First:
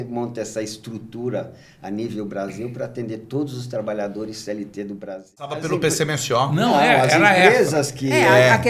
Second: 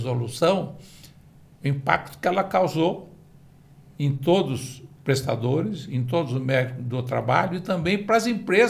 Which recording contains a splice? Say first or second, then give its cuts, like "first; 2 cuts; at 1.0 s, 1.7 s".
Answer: first; 1 cut; at 5.6 s